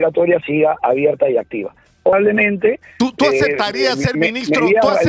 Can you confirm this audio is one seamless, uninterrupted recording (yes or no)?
no